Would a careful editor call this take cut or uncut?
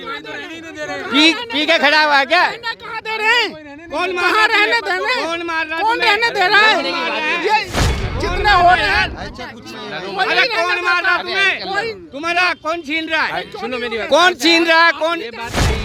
uncut